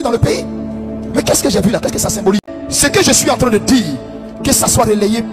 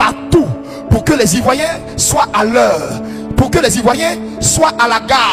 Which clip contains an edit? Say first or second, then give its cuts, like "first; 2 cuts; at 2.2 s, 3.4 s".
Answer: first; 1 cut; at 2.4 s